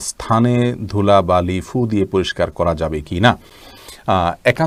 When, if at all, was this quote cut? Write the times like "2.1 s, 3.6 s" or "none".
none